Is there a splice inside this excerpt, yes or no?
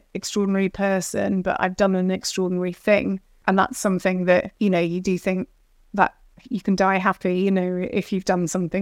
yes